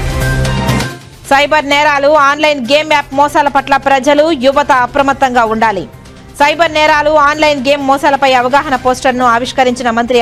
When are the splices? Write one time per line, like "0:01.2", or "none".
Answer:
none